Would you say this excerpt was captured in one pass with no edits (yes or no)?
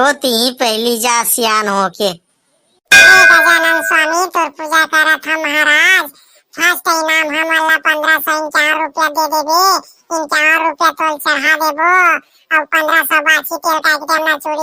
yes